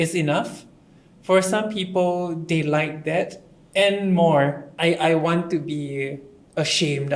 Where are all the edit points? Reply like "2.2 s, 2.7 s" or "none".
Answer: 4.7 s